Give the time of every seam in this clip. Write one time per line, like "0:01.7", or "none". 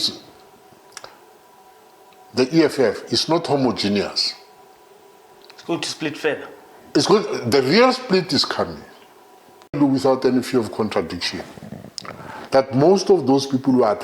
0:09.8